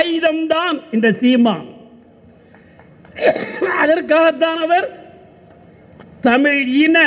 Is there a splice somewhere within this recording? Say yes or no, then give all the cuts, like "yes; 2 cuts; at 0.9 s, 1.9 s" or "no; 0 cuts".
no; 0 cuts